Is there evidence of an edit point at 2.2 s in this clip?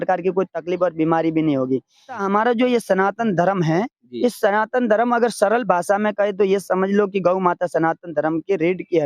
yes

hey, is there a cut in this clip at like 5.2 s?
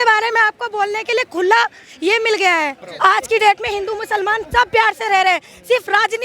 no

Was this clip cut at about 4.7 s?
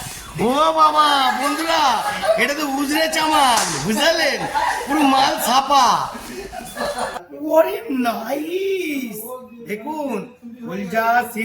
no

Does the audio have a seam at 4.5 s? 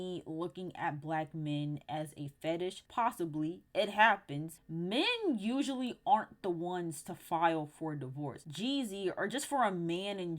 yes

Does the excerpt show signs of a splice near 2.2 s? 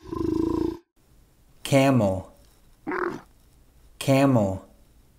no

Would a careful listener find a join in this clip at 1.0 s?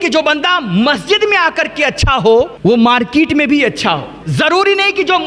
no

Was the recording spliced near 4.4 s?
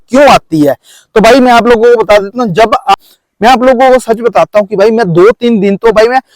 no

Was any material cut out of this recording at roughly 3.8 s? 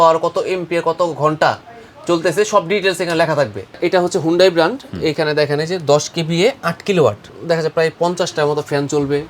yes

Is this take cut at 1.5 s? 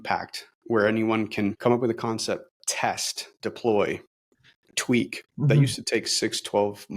yes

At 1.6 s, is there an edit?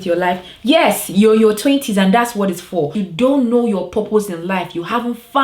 no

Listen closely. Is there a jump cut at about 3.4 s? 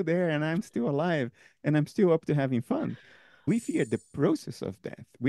yes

